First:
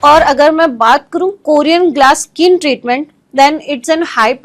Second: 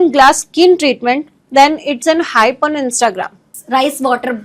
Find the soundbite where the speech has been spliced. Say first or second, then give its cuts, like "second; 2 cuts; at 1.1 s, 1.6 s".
second; 1 cut; at 3.5 s